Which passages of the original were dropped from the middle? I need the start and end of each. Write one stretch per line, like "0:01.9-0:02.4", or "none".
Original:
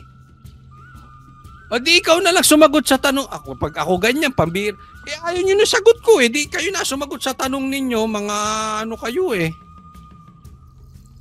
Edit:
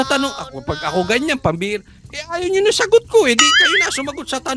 none